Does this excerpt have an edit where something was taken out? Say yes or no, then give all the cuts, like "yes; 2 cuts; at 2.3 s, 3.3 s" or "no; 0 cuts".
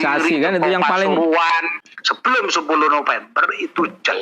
yes; 1 cut; at 1.8 s